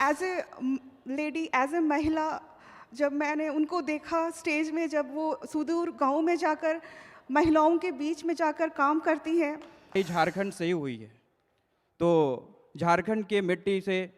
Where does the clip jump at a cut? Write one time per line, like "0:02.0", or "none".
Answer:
0:09.9